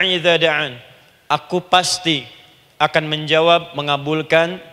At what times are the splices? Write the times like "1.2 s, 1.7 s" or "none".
none